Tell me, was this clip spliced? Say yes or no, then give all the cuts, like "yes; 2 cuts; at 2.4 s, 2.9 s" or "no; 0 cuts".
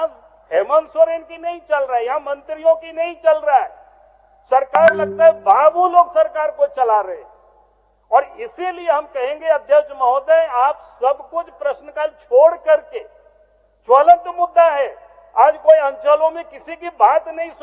no; 0 cuts